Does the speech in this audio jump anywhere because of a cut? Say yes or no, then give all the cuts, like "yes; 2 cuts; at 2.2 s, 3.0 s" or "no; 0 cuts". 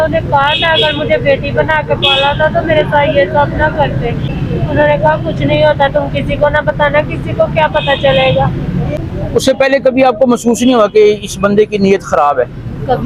yes; 2 cuts; at 4.3 s, 9.0 s